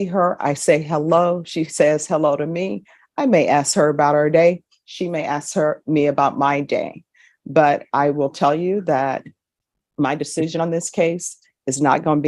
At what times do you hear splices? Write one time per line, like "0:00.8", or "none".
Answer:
none